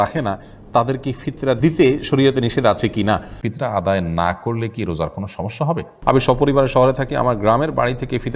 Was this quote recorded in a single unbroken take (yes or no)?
no